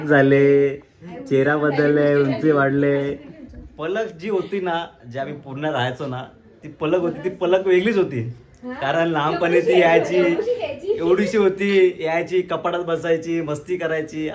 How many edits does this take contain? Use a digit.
0